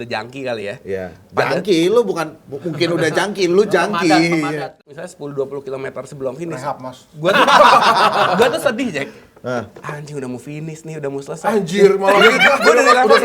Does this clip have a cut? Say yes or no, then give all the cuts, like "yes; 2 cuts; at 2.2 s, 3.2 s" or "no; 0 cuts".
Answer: yes; 1 cut; at 4.7 s